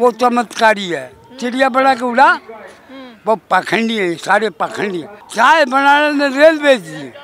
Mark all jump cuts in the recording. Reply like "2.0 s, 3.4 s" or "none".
5.2 s